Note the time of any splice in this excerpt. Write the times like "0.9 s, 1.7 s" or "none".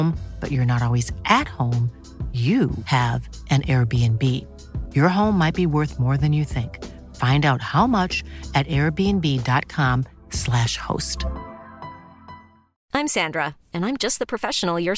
none